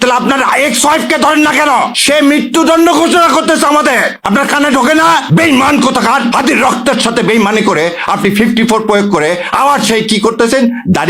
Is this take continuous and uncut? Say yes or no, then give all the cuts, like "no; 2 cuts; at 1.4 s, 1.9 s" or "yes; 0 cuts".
yes; 0 cuts